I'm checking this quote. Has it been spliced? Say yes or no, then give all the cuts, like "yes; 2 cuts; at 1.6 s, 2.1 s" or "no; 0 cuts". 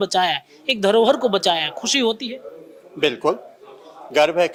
no; 0 cuts